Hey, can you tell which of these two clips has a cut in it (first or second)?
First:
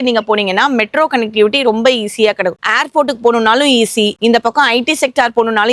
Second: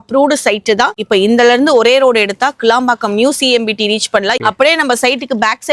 second